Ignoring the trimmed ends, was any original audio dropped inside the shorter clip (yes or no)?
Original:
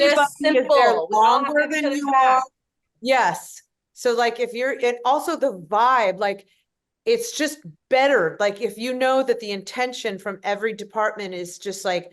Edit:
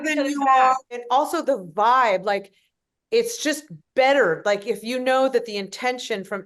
yes